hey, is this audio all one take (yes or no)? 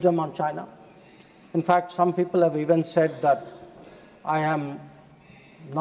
yes